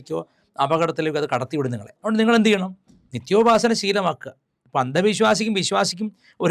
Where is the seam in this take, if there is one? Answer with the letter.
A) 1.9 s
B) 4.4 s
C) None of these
A